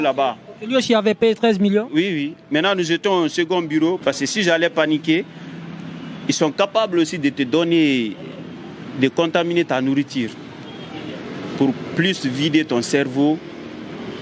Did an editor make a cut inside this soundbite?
yes; 1 cut; at 4.0 s

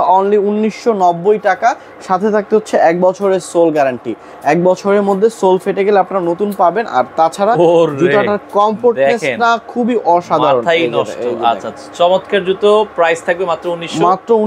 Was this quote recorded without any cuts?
yes; 0 cuts

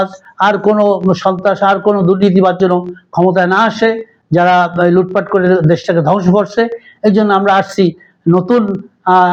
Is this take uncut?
yes; 0 cuts

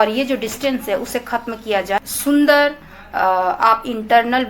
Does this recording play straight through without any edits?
no; 1 cut; at 2.0 s

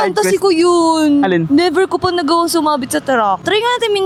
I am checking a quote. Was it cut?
no; 0 cuts

